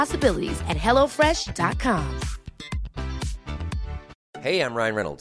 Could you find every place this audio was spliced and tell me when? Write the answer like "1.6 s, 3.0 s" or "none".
4.1 s